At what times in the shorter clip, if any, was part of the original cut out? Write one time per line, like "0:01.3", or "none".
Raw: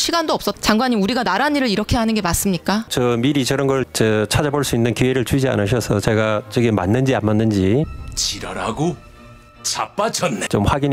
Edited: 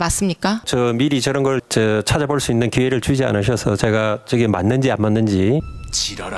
none